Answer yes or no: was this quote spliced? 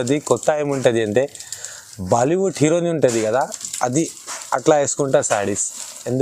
no